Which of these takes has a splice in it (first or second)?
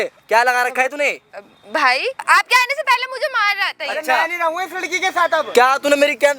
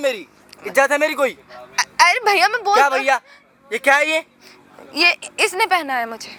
first